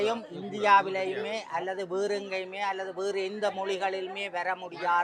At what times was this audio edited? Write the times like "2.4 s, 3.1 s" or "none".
none